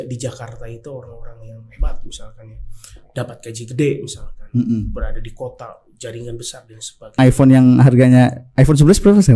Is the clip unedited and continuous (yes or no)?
no